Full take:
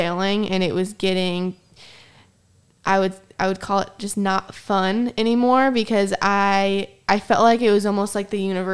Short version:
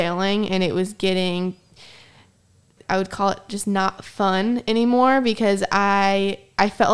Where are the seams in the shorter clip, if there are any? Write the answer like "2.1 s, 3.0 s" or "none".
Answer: 2.7 s